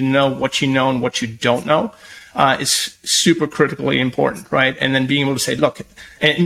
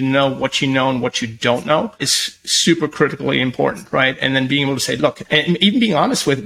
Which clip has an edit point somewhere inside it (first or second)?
second